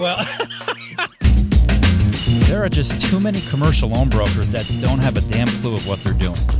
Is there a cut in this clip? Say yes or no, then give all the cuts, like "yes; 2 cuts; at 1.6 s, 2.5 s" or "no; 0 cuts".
yes; 1 cut; at 1.3 s